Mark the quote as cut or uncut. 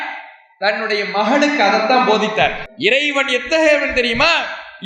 cut